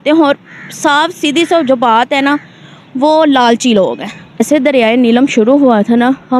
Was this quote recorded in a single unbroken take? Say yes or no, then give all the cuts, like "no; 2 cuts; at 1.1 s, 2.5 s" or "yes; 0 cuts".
no; 1 cut; at 4.4 s